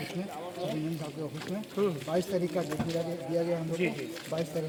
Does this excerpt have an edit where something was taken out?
no; 0 cuts

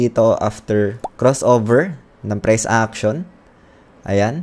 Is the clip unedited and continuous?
no; 1 cut; at 1.0 s

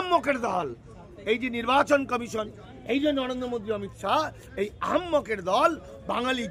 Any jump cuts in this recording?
no; 0 cuts

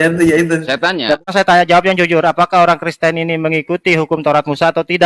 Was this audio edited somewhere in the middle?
yes; 1 cut; at 1.3 s

